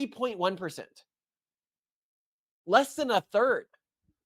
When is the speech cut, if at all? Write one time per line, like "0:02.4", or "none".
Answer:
none